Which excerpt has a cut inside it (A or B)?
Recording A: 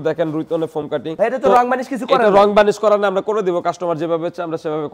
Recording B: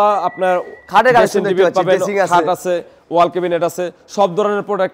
A